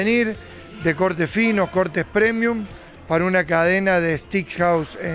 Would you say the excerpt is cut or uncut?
uncut